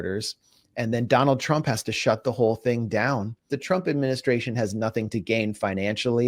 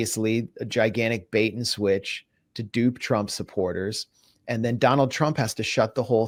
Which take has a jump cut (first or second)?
first